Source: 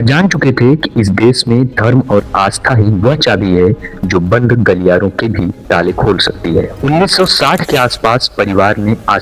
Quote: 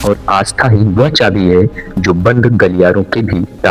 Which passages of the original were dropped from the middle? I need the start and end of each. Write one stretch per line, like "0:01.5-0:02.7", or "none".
none